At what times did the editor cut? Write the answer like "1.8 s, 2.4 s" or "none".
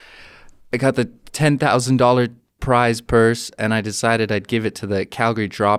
none